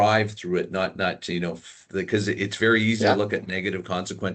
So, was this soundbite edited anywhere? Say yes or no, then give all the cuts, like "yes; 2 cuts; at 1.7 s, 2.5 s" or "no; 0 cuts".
yes; 1 cut; at 1.8 s